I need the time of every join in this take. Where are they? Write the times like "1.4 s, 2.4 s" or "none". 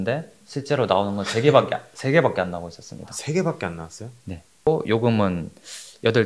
4.7 s